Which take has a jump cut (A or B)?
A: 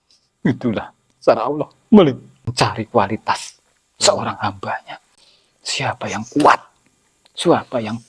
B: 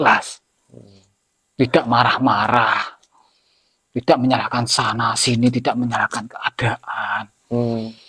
A